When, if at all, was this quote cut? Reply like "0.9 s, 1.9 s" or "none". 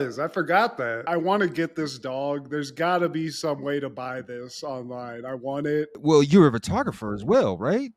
1.0 s, 5.9 s